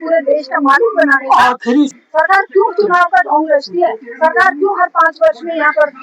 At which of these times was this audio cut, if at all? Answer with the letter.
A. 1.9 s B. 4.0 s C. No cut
A